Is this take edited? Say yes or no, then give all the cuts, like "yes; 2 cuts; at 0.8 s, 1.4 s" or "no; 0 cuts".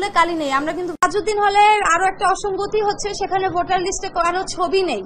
yes; 1 cut; at 1.0 s